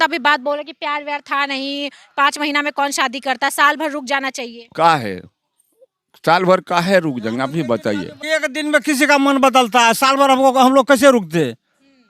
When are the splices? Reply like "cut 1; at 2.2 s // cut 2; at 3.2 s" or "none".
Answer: cut 1; at 8.1 s